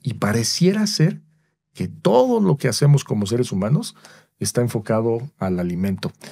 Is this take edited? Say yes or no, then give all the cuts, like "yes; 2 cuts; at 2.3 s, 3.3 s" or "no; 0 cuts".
no; 0 cuts